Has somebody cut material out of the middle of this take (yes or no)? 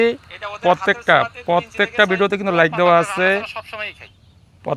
no